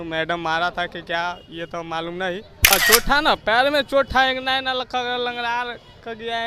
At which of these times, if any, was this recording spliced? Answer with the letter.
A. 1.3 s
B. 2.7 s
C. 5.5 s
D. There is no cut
B